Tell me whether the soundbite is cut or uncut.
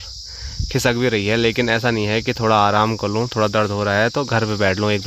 uncut